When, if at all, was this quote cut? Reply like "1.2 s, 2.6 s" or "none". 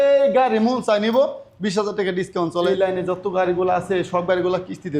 2.7 s